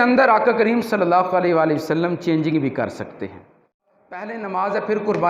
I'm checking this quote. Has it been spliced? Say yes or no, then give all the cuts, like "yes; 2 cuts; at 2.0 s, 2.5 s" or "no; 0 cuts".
yes; 1 cut; at 3.9 s